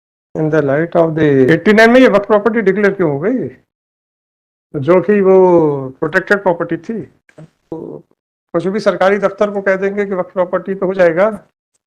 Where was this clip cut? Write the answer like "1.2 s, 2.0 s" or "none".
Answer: 1.5 s, 7.7 s